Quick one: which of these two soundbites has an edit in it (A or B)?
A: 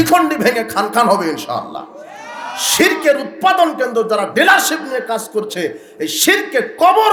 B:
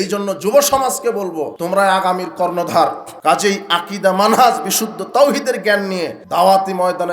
B